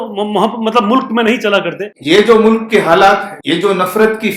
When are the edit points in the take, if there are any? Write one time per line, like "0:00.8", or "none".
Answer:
0:01.9
0:03.3